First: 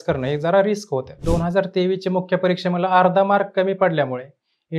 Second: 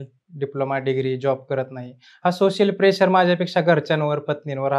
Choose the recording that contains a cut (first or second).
first